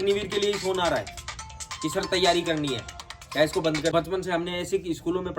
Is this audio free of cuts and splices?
no; 1 cut; at 3.9 s

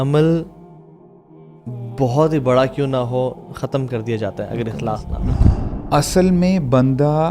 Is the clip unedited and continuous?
no; 1 cut; at 5.4 s

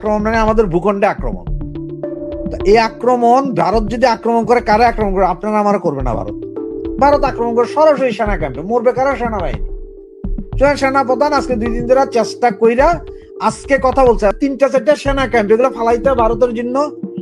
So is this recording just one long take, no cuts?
no; 1 cut; at 14.3 s

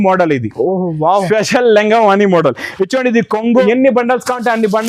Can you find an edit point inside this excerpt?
yes; 1 cut; at 3.6 s

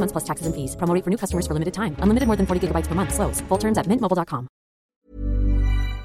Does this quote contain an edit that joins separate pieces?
yes; 1 cut; at 4.9 s

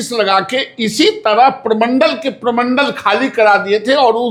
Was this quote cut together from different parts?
no; 0 cuts

